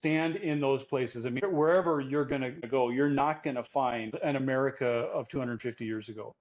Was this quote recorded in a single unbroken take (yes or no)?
no